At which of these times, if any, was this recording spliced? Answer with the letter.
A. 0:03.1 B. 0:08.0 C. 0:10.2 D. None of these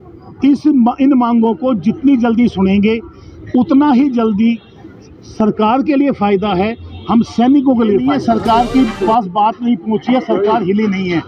B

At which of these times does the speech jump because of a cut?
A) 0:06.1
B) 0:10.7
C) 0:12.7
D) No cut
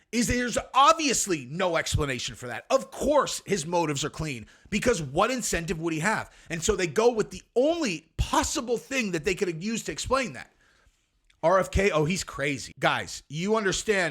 C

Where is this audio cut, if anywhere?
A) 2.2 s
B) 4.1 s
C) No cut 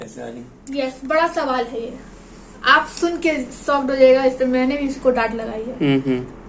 C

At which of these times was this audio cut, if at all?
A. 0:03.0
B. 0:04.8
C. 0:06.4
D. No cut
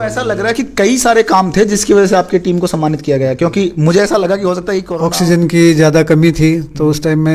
B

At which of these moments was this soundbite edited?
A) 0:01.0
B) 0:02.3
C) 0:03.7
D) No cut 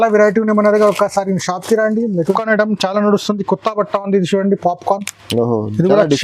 B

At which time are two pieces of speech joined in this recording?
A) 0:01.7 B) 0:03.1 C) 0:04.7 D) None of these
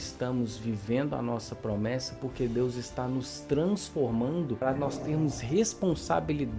D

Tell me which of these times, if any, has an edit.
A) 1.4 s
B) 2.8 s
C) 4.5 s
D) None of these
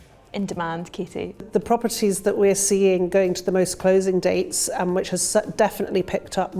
A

